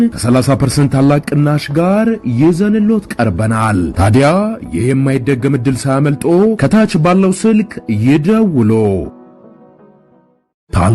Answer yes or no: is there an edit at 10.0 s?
yes